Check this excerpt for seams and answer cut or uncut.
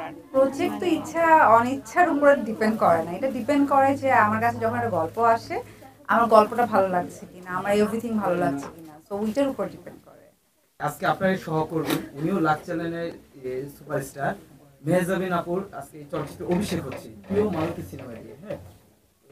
cut